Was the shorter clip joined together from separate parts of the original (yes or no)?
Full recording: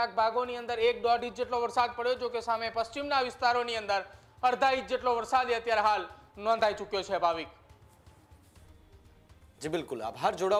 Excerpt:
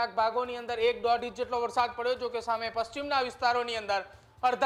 no